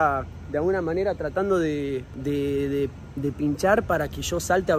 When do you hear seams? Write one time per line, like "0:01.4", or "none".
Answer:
0:02.1